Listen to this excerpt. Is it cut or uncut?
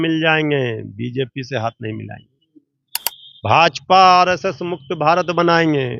uncut